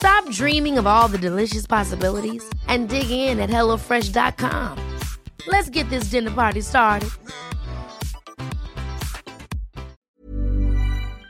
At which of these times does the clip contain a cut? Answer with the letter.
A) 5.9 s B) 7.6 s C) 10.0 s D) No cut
C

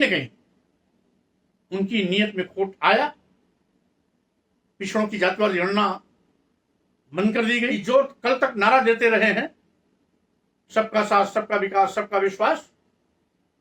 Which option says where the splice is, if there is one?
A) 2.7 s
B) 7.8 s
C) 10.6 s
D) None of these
B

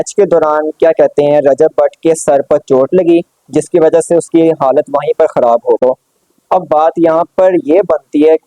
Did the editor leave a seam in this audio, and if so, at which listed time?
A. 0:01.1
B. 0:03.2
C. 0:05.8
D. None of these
C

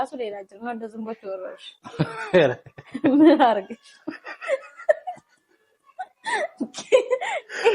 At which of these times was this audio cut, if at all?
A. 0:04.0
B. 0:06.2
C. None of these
C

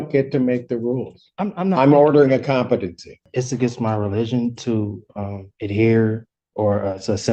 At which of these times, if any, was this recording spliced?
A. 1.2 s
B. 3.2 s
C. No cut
B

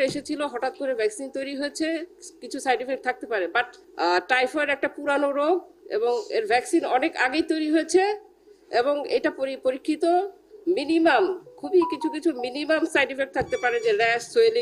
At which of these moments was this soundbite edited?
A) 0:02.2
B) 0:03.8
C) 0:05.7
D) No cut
B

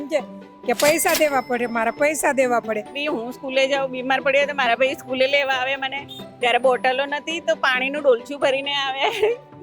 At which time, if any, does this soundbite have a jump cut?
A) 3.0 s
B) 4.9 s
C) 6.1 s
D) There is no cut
A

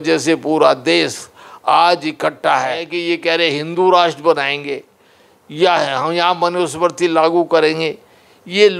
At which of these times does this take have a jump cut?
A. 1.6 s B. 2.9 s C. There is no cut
B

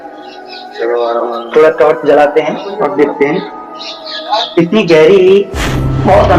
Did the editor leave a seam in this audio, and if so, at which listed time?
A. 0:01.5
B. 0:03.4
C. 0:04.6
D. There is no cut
D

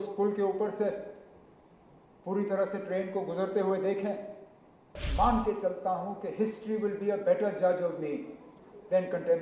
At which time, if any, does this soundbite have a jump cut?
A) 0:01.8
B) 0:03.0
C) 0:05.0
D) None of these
C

